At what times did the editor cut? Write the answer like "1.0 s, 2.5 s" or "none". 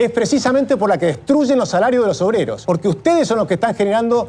2.6 s